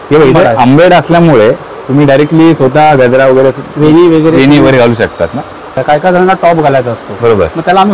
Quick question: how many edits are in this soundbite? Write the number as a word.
one